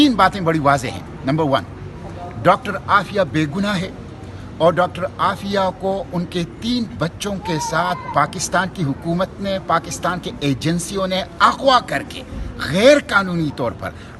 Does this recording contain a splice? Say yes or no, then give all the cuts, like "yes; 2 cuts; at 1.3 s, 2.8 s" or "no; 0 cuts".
no; 0 cuts